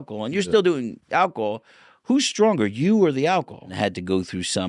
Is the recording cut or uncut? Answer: cut